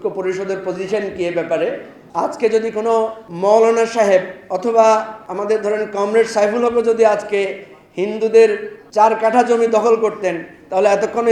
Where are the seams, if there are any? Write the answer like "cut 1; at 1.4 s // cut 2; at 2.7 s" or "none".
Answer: cut 1; at 1.9 s // cut 2; at 3.2 s // cut 3; at 4.4 s // cut 4; at 5.2 s // cut 5; at 8.7 s